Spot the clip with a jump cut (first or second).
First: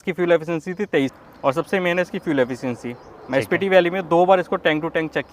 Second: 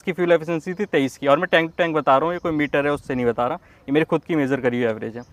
first